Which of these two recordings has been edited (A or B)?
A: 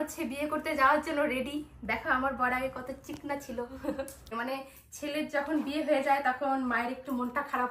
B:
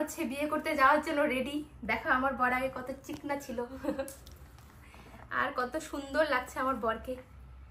A